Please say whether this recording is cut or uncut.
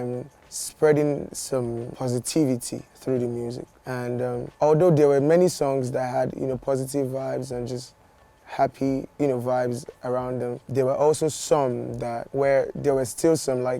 uncut